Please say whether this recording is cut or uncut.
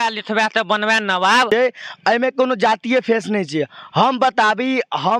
cut